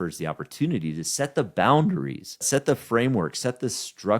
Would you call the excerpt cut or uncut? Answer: cut